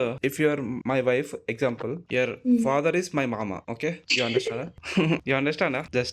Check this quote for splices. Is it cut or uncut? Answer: cut